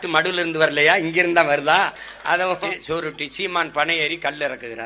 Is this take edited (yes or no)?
yes